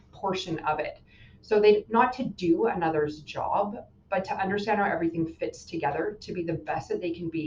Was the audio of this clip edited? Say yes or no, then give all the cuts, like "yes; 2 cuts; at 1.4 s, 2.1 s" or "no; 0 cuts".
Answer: no; 0 cuts